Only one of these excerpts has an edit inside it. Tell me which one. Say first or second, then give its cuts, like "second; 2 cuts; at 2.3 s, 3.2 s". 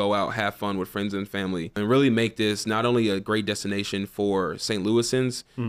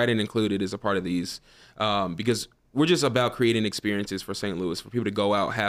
first; 1 cut; at 1.8 s